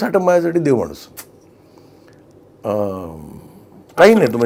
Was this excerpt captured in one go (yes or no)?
yes